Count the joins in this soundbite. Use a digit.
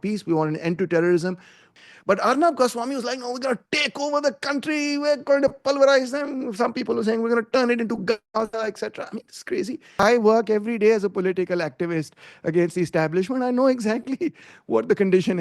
2